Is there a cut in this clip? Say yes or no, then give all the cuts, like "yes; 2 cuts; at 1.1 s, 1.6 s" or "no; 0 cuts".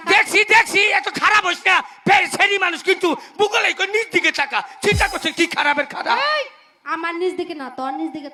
no; 0 cuts